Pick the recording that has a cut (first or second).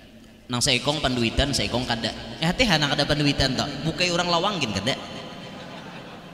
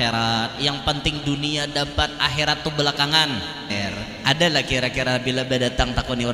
second